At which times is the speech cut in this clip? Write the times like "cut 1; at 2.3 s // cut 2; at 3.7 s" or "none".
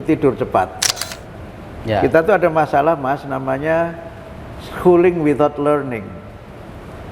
cut 1; at 0.9 s